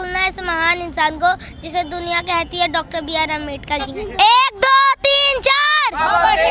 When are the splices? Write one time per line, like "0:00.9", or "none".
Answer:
0:03.9